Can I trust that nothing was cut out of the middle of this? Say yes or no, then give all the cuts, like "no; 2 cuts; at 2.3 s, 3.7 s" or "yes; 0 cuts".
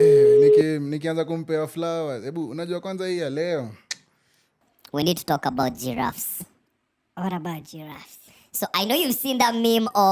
no; 1 cut; at 4.6 s